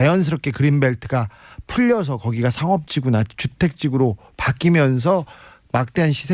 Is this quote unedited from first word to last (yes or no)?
no